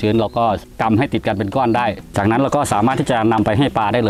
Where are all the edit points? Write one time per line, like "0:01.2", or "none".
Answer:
none

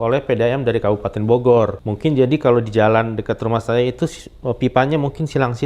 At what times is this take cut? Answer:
0:01.8

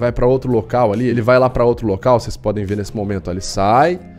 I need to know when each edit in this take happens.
0:01.1

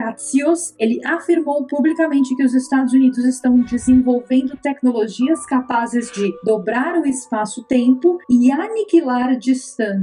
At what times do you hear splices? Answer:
none

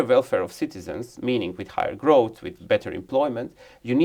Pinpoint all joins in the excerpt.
none

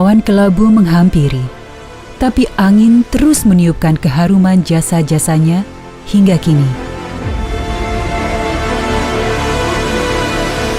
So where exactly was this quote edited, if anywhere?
0:07.4

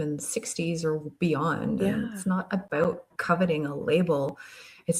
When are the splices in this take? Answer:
0:03.1

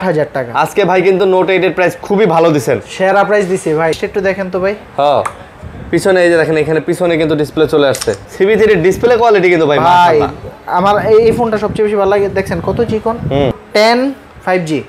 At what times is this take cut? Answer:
0:04.0
0:08.2
0:13.6

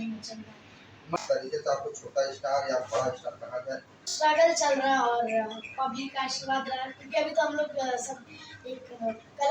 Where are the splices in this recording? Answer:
0:01.2
0:04.1

